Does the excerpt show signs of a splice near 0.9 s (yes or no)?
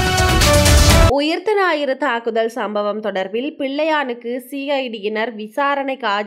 no